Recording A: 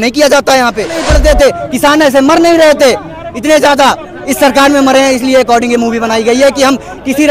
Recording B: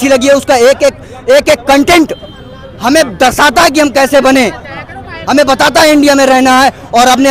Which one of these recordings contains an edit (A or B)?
A